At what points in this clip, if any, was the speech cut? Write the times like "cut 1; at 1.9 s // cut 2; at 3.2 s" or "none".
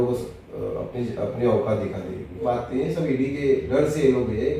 cut 1; at 2.5 s